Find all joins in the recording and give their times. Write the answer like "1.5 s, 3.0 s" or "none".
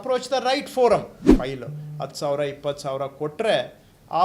1.2 s